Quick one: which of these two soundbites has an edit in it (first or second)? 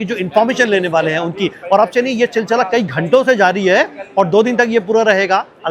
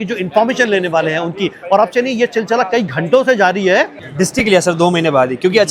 second